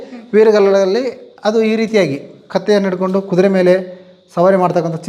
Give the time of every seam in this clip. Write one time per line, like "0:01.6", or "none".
none